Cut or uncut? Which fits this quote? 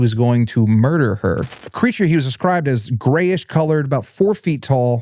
cut